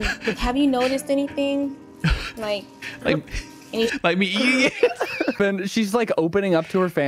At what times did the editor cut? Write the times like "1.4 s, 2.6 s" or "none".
5.4 s